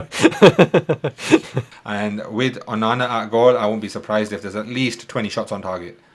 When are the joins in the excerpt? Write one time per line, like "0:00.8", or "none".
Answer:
0:01.7